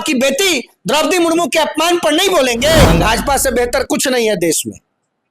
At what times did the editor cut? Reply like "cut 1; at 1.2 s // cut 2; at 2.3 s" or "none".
cut 1; at 2.9 s